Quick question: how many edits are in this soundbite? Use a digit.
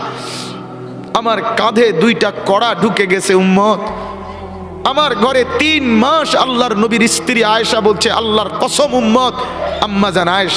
1